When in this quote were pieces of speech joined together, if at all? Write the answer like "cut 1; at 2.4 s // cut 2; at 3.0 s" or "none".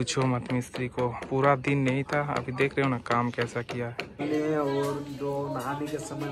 cut 1; at 4.0 s